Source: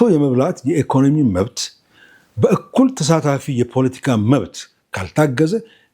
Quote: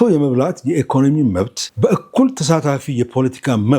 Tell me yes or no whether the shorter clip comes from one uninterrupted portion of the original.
no